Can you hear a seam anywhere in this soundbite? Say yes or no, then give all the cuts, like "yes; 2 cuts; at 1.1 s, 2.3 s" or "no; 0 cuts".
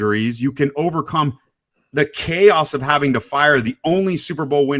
no; 0 cuts